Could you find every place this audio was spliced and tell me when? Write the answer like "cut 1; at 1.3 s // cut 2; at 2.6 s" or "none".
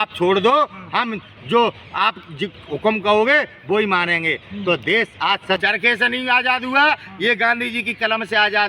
cut 1; at 5.6 s